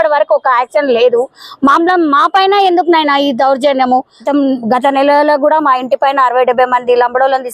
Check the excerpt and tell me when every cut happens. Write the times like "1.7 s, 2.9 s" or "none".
4.2 s